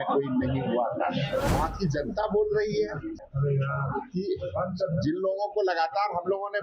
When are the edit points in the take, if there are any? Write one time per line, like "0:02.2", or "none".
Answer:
0:01.5
0:03.3